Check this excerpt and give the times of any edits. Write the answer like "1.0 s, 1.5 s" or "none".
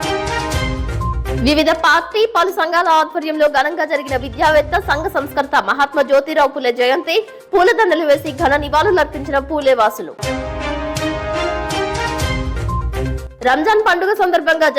1.3 s